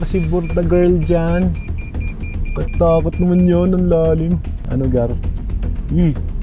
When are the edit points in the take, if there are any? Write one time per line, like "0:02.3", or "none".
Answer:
0:04.5